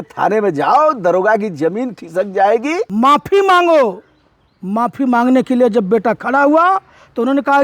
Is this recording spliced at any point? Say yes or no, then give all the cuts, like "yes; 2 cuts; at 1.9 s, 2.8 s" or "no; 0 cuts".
yes; 1 cut; at 2.9 s